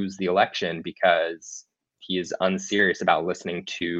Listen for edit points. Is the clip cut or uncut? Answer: uncut